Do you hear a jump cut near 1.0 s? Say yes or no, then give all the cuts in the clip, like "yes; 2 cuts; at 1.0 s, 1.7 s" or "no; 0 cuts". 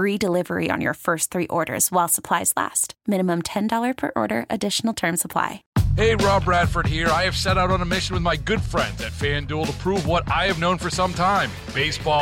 no; 1 cut; at 5.6 s